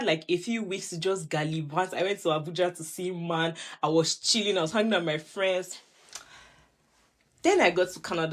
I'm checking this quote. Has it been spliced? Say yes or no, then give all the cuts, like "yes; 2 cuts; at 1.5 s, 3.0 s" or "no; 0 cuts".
no; 0 cuts